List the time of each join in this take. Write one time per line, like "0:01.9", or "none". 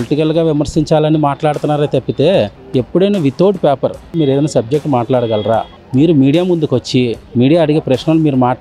0:02.5
0:04.1